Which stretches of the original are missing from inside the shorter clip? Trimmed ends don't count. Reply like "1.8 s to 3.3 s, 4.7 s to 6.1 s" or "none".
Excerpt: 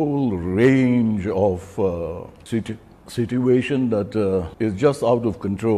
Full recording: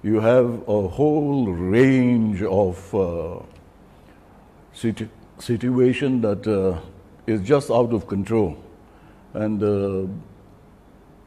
3.5 s to 4.6 s, 6.8 s to 7.2 s